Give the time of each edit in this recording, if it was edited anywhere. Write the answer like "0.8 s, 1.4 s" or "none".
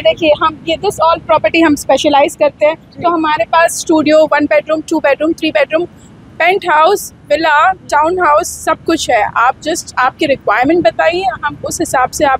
none